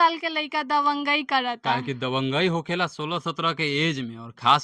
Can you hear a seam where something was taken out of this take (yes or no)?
no